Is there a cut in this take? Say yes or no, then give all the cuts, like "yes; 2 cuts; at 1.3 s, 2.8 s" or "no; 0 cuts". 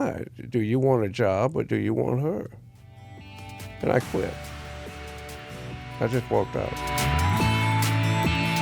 yes; 1 cut; at 6.8 s